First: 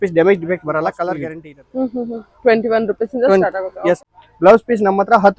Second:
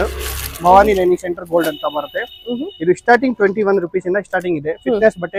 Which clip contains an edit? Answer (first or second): first